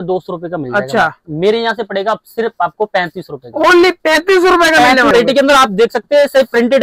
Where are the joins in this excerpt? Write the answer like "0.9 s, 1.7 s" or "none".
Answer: 5.1 s